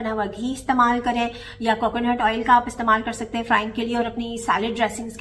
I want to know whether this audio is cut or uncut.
uncut